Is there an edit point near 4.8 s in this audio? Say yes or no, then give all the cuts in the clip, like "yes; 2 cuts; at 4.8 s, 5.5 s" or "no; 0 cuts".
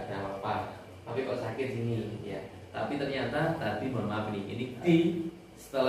yes; 1 cut; at 4.8 s